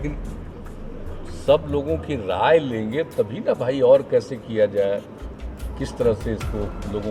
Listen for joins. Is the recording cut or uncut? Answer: uncut